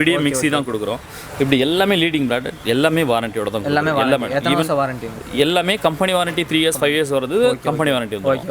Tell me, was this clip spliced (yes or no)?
no